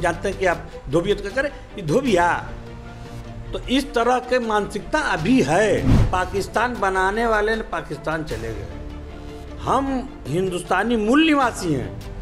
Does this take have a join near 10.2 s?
no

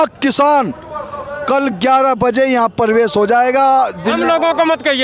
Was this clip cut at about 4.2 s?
no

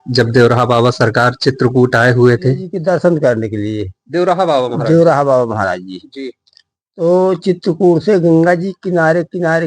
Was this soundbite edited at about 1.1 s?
no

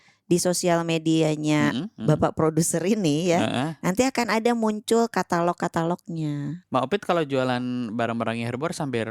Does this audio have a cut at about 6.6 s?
yes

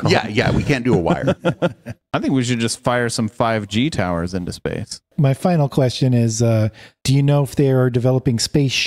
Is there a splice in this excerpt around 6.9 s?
no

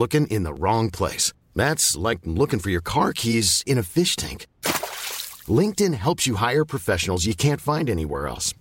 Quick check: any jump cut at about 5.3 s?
no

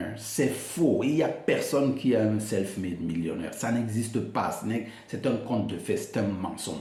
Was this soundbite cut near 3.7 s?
no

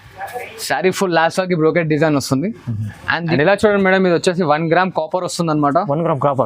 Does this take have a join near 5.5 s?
no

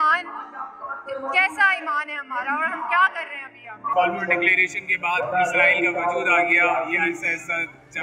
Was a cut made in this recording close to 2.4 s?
no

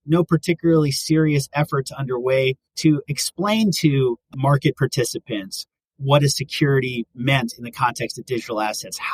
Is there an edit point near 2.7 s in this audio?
yes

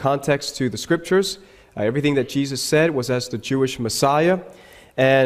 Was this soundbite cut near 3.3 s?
yes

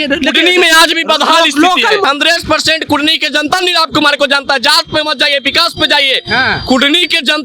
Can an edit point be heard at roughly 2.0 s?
yes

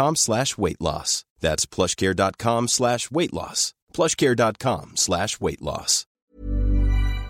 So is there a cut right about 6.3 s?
yes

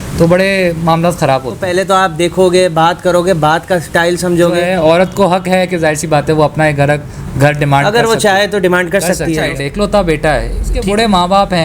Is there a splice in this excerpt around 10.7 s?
yes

